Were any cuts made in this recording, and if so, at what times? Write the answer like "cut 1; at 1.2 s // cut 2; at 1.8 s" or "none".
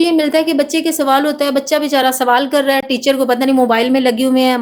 none